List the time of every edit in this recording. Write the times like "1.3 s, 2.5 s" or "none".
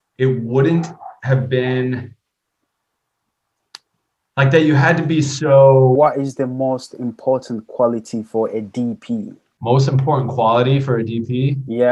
6.0 s, 9.4 s